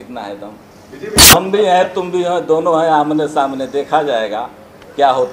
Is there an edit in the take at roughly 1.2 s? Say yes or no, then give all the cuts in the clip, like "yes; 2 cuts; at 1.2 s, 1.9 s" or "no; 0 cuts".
yes; 1 cut; at 1.2 s